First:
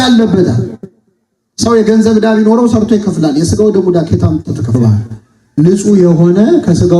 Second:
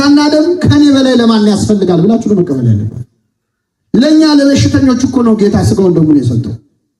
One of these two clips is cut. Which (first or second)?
first